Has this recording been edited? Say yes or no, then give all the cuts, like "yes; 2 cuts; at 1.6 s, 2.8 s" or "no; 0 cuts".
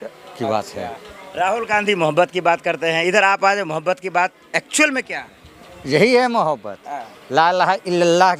no; 0 cuts